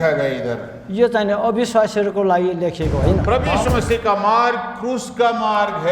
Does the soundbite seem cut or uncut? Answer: cut